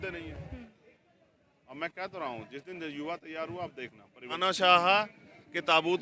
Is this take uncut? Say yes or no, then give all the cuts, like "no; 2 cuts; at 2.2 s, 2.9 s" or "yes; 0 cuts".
no; 1 cut; at 4.4 s